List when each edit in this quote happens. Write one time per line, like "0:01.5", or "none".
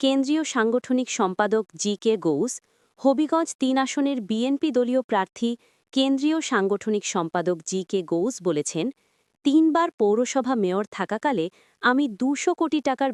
none